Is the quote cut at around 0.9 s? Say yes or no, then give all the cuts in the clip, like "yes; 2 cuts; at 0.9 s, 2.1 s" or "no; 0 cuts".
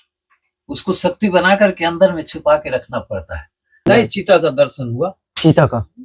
no; 1 cut; at 3.9 s